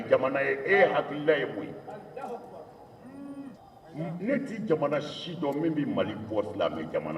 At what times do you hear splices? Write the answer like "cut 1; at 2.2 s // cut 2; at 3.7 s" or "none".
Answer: cut 1; at 3.6 s